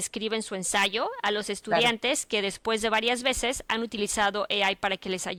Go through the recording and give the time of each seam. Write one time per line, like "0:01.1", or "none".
none